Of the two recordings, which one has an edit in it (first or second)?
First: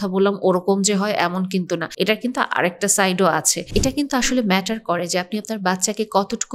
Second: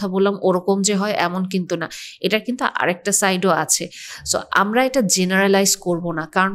first